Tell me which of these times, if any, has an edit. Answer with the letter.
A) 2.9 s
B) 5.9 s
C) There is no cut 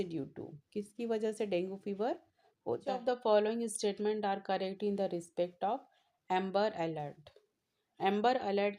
A